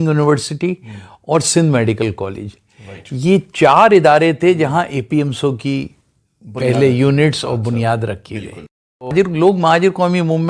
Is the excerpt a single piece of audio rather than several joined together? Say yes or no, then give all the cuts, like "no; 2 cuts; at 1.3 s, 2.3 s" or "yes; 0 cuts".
no; 1 cut; at 9.1 s